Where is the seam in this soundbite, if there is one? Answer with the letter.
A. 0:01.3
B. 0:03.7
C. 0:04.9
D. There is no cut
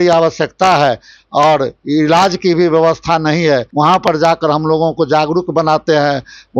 B